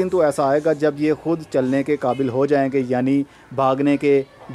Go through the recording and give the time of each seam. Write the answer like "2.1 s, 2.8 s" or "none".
none